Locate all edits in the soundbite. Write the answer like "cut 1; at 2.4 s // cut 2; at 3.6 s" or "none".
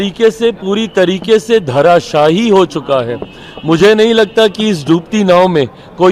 none